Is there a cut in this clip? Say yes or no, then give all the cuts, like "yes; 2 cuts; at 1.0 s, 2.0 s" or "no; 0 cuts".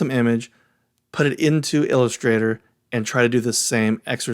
no; 0 cuts